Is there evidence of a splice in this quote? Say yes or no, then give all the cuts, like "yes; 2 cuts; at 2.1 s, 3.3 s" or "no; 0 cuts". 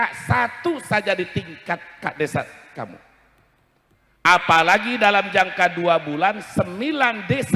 no; 0 cuts